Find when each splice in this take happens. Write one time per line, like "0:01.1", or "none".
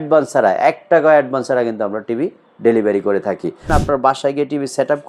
0:03.7